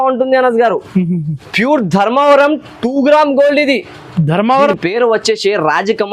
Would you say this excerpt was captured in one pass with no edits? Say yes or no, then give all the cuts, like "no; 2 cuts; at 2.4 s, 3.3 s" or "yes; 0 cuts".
no; 1 cut; at 4.7 s